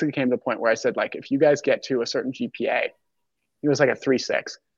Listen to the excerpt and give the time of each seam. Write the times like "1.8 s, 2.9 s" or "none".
none